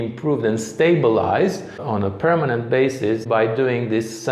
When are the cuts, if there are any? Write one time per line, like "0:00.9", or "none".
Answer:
0:01.8
0:03.2